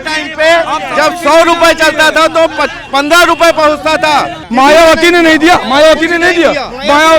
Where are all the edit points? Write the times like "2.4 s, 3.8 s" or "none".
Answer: 4.4 s